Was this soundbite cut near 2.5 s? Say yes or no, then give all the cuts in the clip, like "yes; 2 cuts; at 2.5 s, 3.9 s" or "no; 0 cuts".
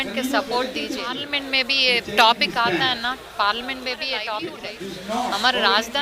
no; 2 cuts; at 1.2 s, 4.7 s